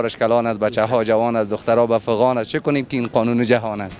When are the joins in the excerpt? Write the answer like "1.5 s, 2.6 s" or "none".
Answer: none